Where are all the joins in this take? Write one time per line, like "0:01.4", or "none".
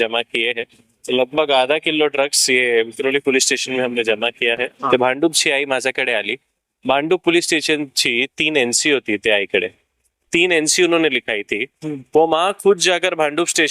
0:04.9